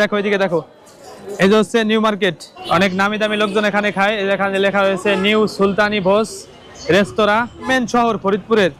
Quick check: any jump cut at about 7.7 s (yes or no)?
yes